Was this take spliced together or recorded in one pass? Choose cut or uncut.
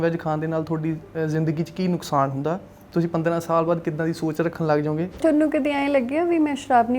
cut